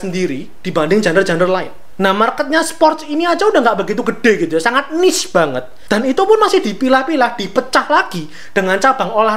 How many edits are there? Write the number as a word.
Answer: two